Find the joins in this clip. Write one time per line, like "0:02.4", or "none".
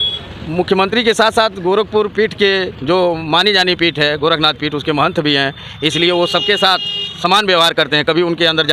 none